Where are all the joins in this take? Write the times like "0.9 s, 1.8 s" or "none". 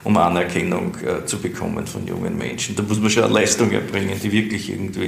none